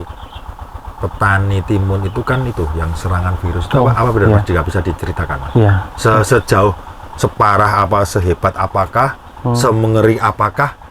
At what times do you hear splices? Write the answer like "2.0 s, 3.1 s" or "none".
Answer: none